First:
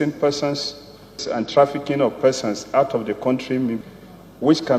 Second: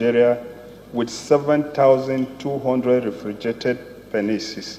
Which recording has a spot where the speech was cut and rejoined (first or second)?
first